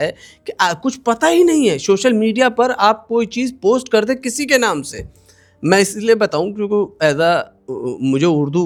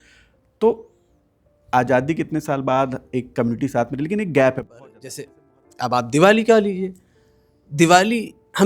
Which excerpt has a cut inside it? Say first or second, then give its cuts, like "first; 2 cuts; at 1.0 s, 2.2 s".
second; 1 cut; at 4.7 s